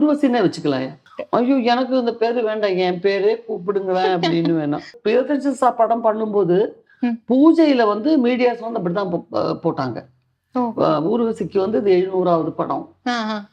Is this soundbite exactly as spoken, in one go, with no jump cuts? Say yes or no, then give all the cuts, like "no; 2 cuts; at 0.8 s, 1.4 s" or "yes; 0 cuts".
no; 2 cuts; at 1.0 s, 4.9 s